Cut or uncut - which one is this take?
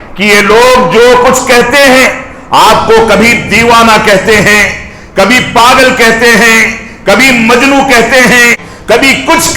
cut